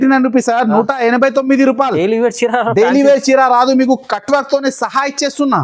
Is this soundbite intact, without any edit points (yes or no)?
yes